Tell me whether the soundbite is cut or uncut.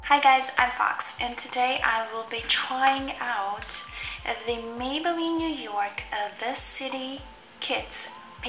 uncut